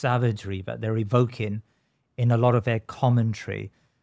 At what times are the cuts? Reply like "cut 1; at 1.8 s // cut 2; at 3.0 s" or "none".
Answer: none